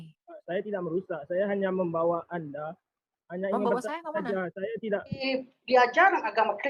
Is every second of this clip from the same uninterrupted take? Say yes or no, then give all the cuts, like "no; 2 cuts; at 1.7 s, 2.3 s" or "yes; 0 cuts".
no; 1 cut; at 5.2 s